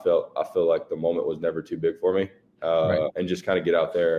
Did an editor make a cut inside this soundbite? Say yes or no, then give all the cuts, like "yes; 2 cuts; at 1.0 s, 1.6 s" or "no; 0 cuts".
yes; 1 cut; at 3.2 s